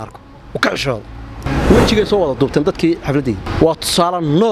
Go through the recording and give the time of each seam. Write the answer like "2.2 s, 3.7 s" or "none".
1.5 s, 3.5 s